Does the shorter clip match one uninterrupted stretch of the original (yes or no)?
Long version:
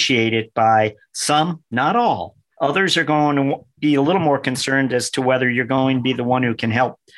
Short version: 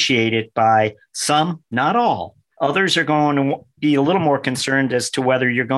yes